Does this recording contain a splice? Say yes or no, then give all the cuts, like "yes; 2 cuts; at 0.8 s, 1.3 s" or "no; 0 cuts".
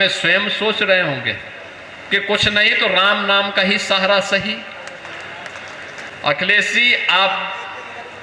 yes; 1 cut; at 6.1 s